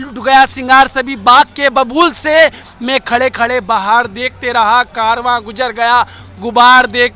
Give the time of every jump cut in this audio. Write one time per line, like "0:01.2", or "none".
none

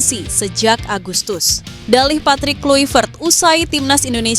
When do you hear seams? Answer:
0:01.7

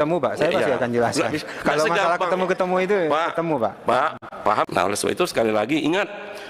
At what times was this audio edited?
0:04.6

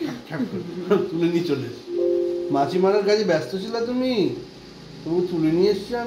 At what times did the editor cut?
none

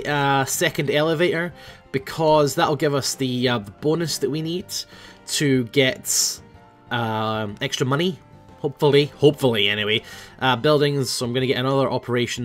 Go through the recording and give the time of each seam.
none

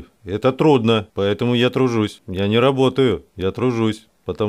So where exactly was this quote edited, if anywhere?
0:01.1
0:02.2

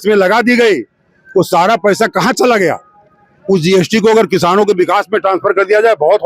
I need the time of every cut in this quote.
none

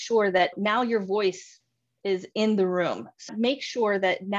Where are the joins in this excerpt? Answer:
0:03.3

